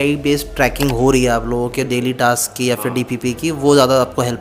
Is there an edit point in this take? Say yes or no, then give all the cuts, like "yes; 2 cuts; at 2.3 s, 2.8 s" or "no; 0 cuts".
no; 0 cuts